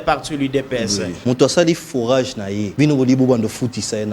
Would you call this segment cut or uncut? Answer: cut